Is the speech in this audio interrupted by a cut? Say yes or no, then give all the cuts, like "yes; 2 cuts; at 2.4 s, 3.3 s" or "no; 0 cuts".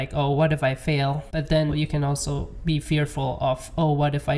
yes; 1 cut; at 1.7 s